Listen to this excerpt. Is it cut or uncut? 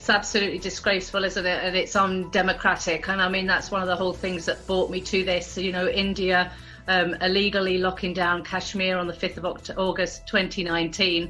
uncut